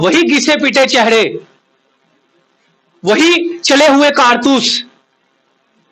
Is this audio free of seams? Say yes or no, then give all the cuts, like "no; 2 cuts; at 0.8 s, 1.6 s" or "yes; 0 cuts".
yes; 0 cuts